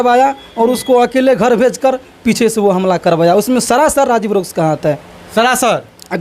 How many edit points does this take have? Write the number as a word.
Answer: zero